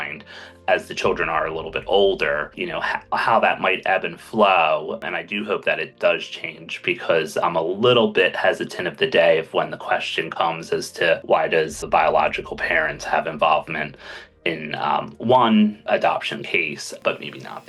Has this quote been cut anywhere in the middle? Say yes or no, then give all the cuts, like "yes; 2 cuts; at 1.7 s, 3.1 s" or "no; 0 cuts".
yes; 4 cuts; at 5.0 s, 7.4 s, 11.5 s, 15.9 s